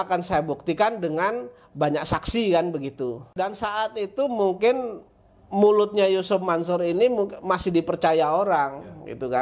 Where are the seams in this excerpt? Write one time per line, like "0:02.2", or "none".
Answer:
0:03.4